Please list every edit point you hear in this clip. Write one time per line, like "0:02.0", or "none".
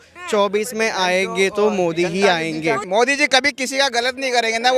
0:02.8